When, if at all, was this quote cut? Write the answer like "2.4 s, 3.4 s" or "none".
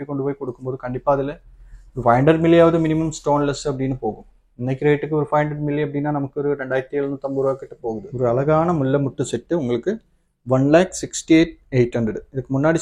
8.1 s